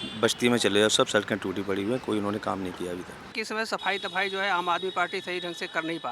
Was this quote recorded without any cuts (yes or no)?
no